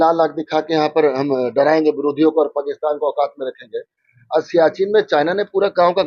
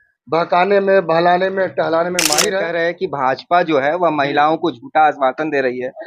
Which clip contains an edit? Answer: second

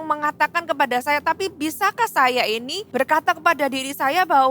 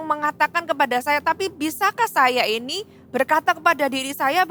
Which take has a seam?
first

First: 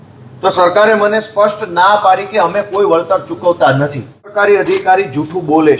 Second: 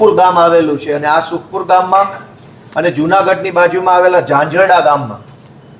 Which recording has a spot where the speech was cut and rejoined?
first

